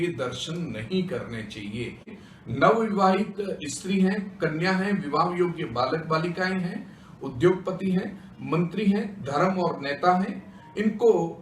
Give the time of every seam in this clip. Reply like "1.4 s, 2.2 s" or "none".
2.2 s